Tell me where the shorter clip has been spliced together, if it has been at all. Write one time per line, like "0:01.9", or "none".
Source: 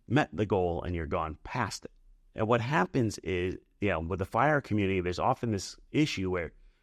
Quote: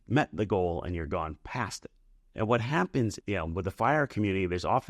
0:03.2